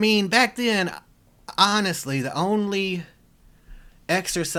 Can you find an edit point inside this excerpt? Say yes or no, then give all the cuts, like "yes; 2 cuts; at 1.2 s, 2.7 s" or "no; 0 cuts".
no; 0 cuts